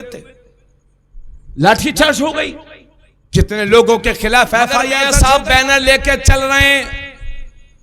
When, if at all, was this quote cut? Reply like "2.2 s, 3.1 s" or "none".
5.0 s